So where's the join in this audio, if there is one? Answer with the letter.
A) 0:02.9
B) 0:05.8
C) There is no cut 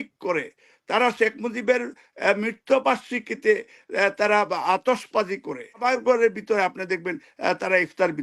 B